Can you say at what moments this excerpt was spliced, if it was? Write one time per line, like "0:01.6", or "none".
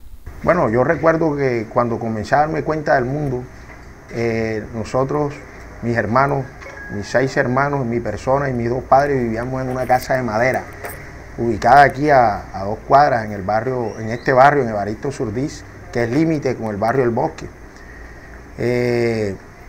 0:08.8